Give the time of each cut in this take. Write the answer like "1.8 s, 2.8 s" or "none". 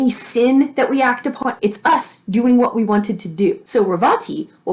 1.4 s, 3.6 s